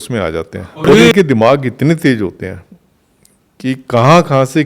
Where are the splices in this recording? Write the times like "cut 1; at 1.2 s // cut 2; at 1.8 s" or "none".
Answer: cut 1; at 1.1 s